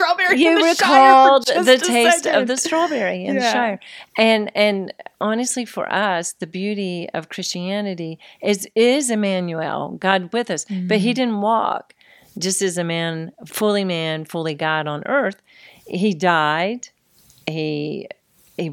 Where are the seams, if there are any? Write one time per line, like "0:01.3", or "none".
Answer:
none